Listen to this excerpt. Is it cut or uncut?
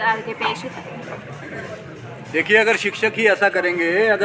uncut